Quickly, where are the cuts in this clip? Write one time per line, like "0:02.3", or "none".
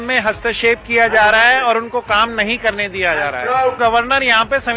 0:03.8